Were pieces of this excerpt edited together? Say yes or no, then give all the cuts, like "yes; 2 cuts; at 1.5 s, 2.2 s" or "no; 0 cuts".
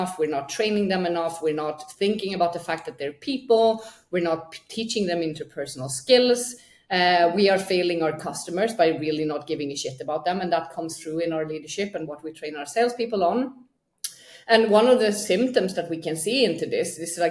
no; 0 cuts